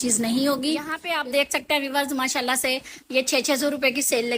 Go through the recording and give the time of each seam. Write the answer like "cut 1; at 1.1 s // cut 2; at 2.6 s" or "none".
cut 1; at 0.9 s